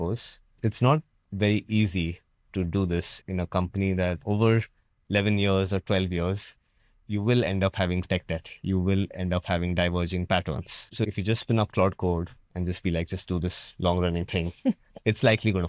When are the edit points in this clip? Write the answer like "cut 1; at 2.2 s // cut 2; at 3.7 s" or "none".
none